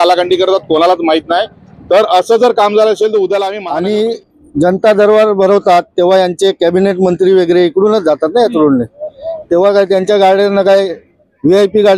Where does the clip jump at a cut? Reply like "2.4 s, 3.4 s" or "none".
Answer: 3.6 s